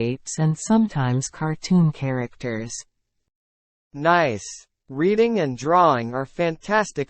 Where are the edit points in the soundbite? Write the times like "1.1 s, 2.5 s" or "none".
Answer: 4.1 s